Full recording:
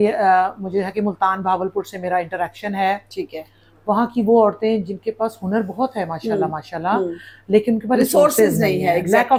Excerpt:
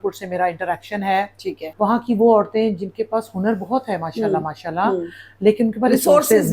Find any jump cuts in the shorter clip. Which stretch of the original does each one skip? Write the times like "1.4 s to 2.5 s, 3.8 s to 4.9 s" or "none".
3.4 s to 3.7 s